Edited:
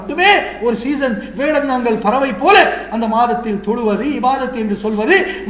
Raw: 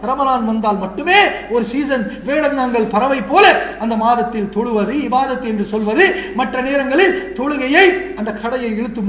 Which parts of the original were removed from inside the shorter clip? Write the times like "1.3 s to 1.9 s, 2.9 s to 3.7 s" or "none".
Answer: none